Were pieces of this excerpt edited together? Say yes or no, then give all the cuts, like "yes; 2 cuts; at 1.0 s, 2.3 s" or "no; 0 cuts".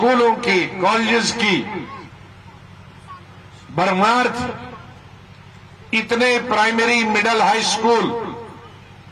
no; 0 cuts